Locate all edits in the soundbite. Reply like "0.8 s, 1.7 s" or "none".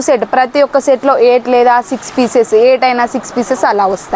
none